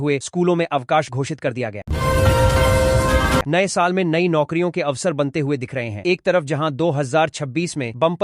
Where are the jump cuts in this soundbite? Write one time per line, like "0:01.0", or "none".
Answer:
0:01.8
0:03.5